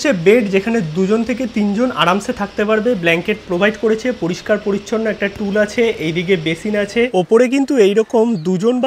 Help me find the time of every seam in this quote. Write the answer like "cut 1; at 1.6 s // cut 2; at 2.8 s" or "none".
cut 1; at 7.1 s